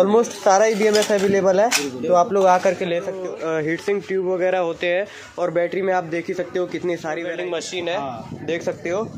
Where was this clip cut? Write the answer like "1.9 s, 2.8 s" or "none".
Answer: 3.1 s, 7.3 s